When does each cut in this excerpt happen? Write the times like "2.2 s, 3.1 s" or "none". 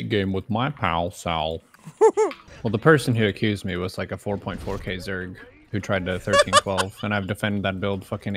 2.5 s